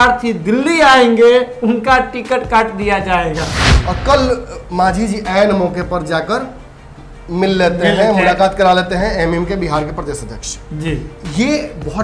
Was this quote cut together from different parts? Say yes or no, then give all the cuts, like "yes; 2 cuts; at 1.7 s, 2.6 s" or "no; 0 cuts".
yes; 1 cut; at 3.6 s